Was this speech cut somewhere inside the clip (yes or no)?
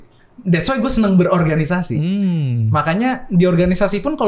no